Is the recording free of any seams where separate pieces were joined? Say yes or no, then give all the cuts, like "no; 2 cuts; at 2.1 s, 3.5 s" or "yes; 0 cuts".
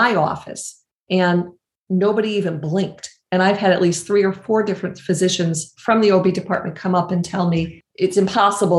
no; 1 cut; at 7.8 s